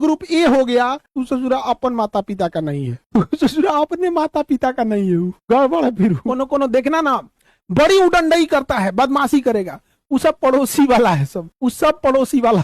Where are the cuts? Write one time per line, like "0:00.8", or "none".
0:06.3